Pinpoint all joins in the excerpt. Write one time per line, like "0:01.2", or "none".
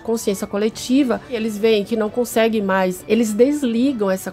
0:01.3
0:03.0